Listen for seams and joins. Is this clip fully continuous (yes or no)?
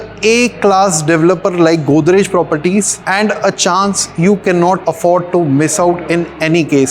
yes